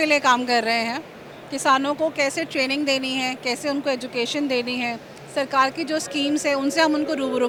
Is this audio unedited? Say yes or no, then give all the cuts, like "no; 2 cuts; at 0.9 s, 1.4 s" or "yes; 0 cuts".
yes; 0 cuts